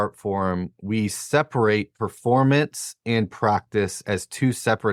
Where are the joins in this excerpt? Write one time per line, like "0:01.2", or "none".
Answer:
none